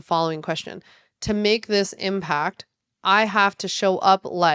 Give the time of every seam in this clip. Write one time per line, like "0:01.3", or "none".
none